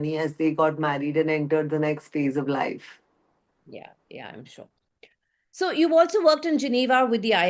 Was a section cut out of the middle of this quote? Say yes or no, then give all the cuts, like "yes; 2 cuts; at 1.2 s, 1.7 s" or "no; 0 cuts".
no; 0 cuts